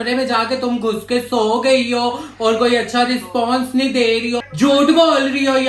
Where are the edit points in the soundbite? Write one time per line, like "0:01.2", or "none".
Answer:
0:04.4